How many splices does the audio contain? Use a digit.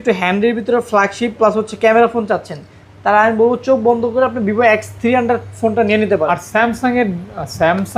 1